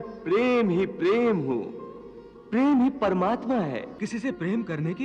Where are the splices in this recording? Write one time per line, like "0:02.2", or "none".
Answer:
0:04.0